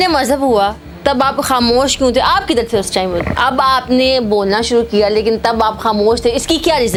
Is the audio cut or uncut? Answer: uncut